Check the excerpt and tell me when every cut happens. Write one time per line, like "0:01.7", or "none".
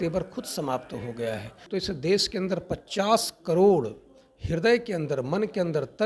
0:01.5